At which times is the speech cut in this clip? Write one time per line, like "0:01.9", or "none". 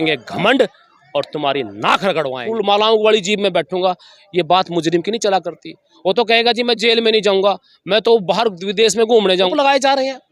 0:02.4
0:09.5